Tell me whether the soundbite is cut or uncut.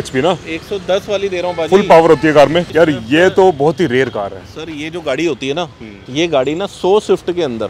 cut